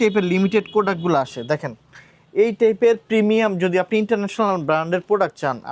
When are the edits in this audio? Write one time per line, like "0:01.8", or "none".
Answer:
none